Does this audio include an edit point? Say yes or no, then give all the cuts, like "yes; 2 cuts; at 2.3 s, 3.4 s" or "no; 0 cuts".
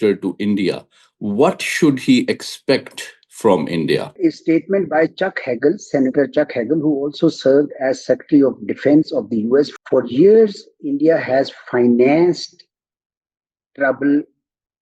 yes; 2 cuts; at 4.1 s, 9.7 s